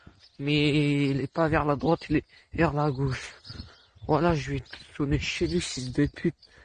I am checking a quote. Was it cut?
no; 0 cuts

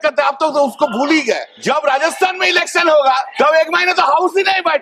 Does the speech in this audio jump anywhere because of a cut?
yes; 2 cuts; at 1.5 s, 3.3 s

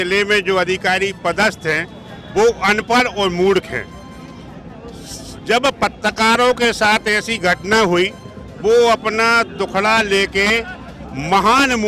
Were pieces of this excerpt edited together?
no; 0 cuts

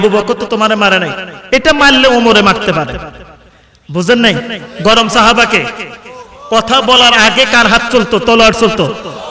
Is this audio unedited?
yes; 0 cuts

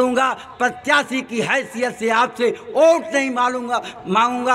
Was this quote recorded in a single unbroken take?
yes; 0 cuts

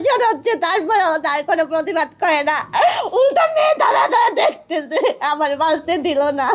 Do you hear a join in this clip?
no; 0 cuts

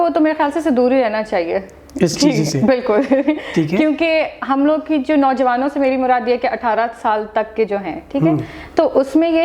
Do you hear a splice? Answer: no; 0 cuts

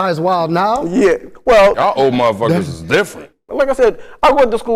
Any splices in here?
yes; 2 cuts; at 1.8 s, 3.2 s

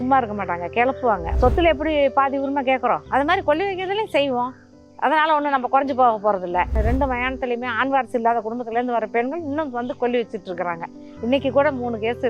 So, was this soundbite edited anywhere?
yes; 2 cuts; at 1.3 s, 6.7 s

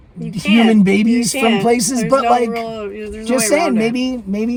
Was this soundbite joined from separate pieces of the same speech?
no; 0 cuts

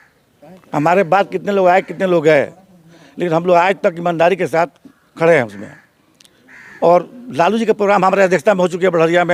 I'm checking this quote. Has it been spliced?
no; 0 cuts

